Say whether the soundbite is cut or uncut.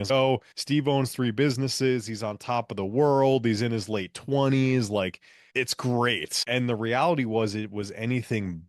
uncut